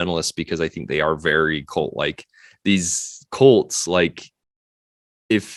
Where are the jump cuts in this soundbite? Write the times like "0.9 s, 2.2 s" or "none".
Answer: none